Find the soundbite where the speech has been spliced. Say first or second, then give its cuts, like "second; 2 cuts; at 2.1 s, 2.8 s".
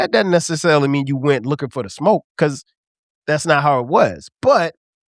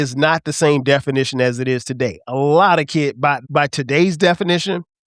second; 1 cut; at 3.4 s